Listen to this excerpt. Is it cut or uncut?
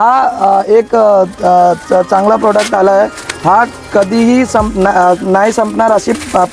uncut